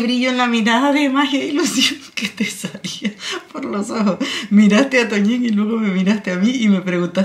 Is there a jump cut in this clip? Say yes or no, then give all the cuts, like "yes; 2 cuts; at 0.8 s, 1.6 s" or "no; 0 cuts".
no; 0 cuts